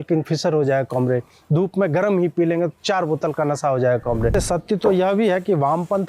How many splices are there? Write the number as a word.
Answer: one